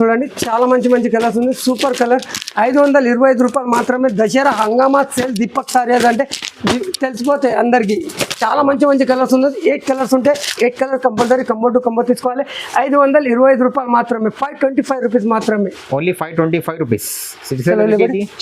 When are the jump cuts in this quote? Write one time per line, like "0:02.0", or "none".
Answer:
none